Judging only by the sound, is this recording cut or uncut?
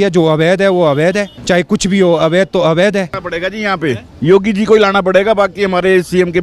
cut